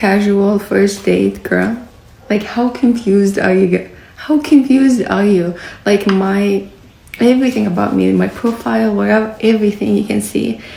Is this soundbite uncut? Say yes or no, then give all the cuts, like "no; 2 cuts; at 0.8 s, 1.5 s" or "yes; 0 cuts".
yes; 0 cuts